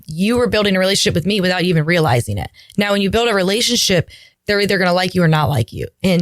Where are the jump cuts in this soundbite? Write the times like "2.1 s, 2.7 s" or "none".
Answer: 4.3 s